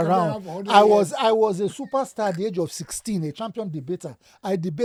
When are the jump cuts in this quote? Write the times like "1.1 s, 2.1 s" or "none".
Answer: none